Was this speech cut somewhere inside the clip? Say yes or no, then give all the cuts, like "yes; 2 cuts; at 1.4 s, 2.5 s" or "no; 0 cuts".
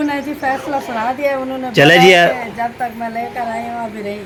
no; 0 cuts